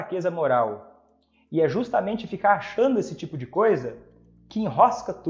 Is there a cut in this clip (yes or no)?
no